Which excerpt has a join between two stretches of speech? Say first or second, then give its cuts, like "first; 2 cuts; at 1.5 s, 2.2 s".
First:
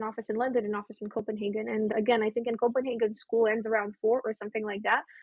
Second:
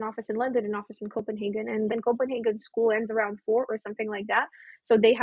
second; 1 cut; at 1.9 s